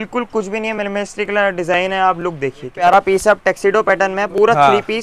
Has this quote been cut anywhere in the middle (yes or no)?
yes